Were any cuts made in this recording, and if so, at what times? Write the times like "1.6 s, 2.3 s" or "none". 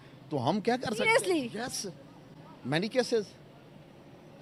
none